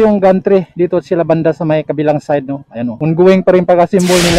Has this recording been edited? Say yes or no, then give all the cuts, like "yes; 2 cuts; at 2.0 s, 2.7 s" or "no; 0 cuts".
yes; 1 cut; at 2.9 s